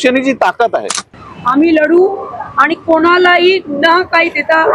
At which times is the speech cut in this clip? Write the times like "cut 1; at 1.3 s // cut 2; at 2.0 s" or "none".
cut 1; at 1.0 s

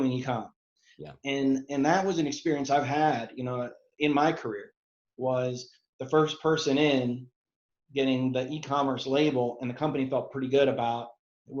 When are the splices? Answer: cut 1; at 3.8 s

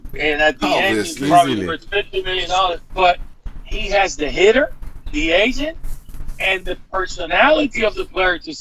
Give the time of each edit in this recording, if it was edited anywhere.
cut 1; at 2.8 s

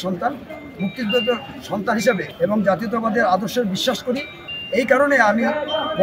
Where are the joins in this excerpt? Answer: cut 1; at 2.3 s

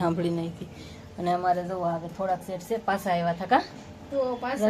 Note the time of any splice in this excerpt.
none

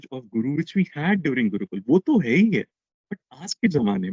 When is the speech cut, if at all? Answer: none

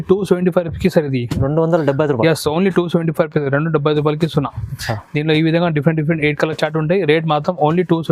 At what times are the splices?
none

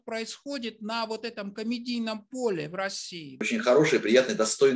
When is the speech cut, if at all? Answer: cut 1; at 3.4 s

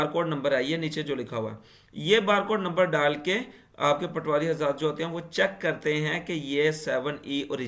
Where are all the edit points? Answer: none

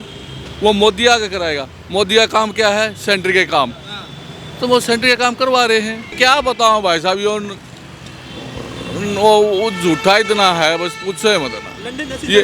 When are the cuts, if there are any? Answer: cut 1; at 6.0 s

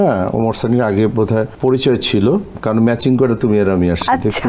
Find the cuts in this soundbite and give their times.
cut 1; at 1.5 s // cut 2; at 2.6 s

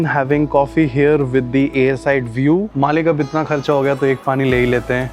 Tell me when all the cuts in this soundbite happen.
cut 1; at 2.7 s

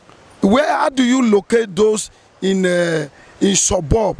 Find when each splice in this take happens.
none

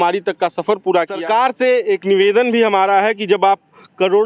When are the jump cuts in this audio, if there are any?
cut 1; at 1.2 s

